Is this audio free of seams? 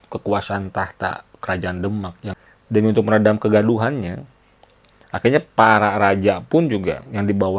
no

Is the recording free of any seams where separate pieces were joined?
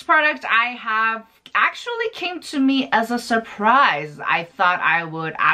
yes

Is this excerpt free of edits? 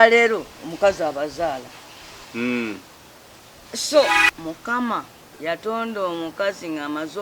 no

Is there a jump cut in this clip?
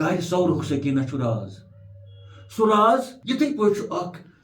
yes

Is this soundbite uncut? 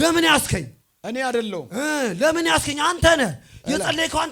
yes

